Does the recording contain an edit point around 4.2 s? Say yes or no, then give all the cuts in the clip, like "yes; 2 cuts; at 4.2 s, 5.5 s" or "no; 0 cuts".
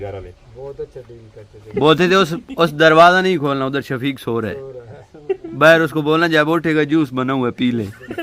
no; 1 cut; at 1.7 s